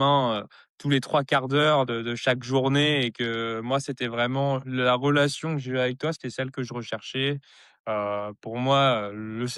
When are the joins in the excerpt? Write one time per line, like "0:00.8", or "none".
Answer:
none